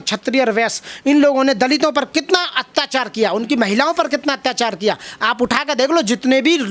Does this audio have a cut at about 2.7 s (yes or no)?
no